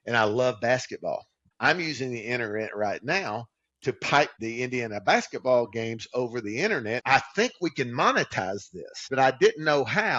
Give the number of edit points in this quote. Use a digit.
4